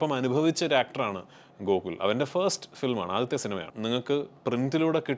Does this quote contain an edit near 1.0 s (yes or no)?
no